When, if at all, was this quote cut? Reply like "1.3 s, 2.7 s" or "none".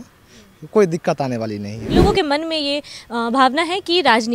2.0 s